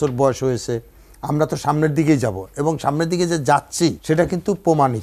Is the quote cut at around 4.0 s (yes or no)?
yes